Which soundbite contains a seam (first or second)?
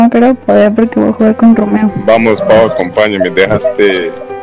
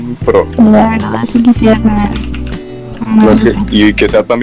first